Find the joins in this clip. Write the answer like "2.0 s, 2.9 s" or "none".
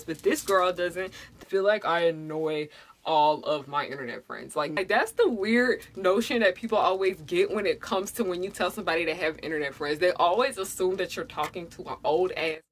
1.3 s, 4.8 s

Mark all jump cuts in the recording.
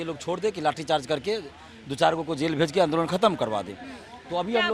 none

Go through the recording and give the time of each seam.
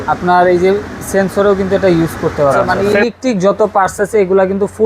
2.7 s

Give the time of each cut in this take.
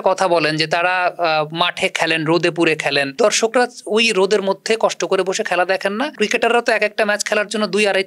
3.2 s, 6.1 s

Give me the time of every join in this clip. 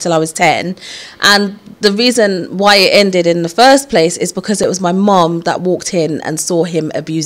none

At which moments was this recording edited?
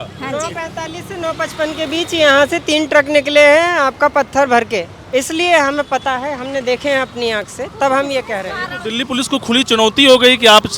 5.0 s

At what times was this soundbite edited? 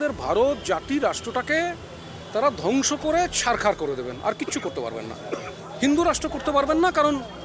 none

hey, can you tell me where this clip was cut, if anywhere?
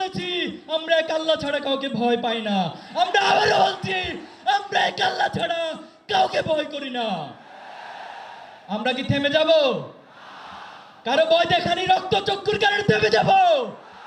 none

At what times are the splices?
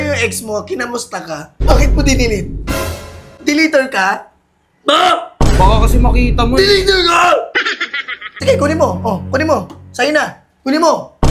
1.6 s, 8.3 s

